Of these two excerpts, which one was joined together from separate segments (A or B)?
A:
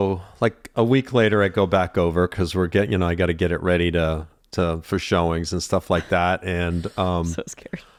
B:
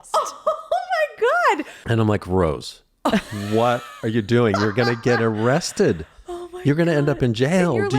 B